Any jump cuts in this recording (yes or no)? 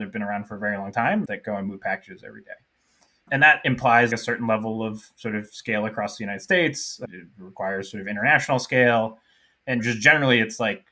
yes